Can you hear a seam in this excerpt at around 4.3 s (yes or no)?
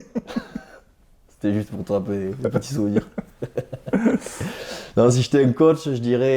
no